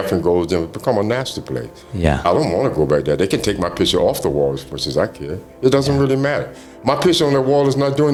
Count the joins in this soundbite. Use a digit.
0